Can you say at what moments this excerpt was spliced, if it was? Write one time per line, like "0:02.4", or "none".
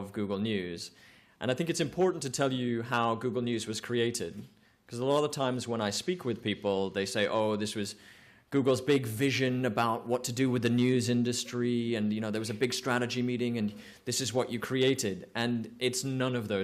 0:07.3